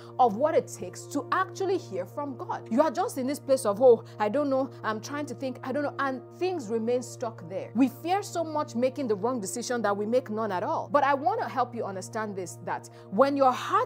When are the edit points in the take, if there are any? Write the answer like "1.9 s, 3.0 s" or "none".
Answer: 2.5 s, 7.7 s, 10.9 s